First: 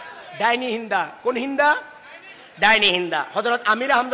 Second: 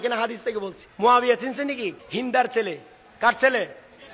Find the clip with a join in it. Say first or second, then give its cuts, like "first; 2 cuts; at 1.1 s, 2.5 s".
second; 2 cuts; at 1.1 s, 2.0 s